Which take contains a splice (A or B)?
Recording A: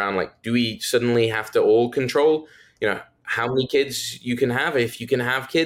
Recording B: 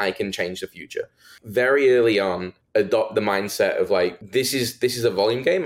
B